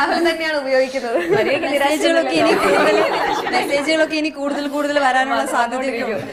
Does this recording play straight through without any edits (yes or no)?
yes